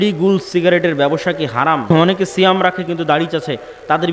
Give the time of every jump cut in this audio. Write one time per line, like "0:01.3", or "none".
0:01.8